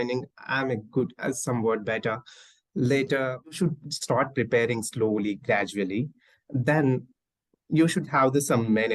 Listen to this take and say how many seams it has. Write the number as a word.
one